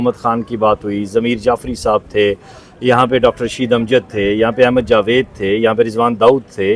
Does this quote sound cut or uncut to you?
uncut